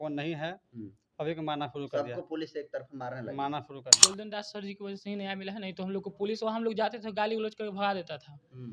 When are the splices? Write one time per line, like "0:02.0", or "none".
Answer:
0:03.9